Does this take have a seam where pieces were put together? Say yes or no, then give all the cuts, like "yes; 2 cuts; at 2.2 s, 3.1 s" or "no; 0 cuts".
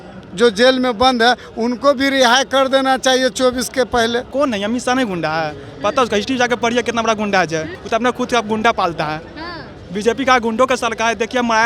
yes; 2 cuts; at 4.3 s, 7.8 s